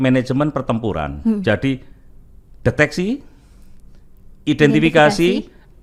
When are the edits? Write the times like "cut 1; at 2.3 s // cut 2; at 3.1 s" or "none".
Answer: none